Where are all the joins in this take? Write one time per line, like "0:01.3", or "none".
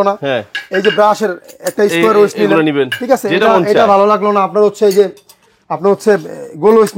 none